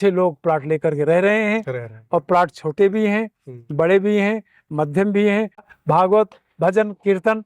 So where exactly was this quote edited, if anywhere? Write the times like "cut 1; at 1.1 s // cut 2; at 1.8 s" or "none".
cut 1; at 5.7 s